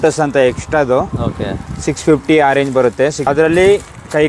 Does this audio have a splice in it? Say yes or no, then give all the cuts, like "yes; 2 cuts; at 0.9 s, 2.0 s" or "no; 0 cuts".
yes; 1 cut; at 3.2 s